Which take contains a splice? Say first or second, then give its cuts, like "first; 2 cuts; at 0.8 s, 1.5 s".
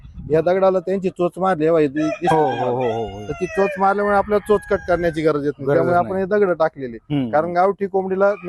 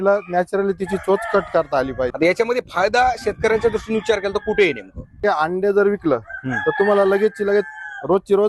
second; 2 cuts; at 2.1 s, 5.2 s